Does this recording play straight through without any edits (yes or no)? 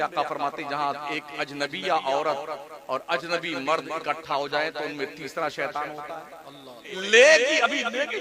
no